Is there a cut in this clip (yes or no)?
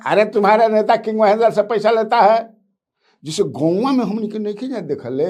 no